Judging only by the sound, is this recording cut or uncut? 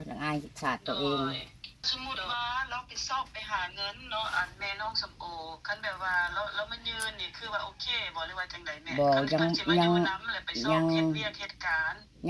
cut